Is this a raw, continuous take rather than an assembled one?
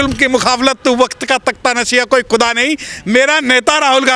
yes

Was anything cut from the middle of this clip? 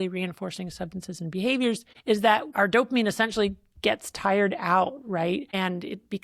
yes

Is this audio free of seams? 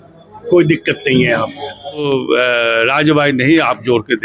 no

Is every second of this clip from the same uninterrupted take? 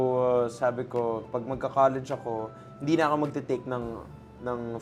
yes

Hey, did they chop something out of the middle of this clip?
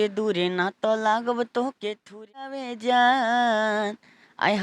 yes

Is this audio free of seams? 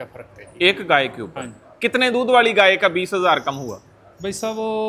yes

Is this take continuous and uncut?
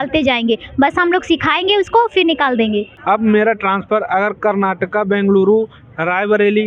no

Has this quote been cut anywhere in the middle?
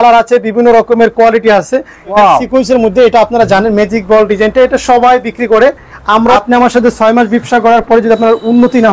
yes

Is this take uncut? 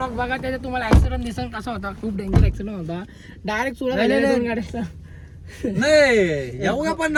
yes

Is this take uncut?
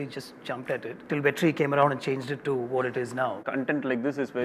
no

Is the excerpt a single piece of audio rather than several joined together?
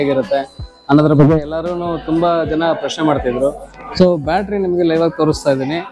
yes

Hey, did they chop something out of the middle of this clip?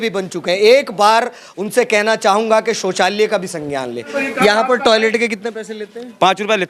yes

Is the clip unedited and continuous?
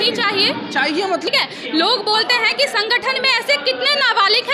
no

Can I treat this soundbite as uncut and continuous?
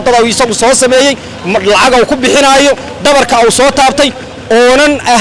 yes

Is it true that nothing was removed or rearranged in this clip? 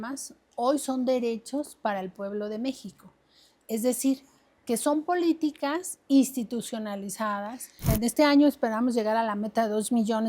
no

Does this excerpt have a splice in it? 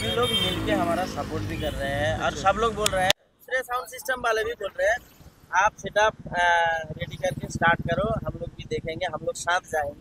no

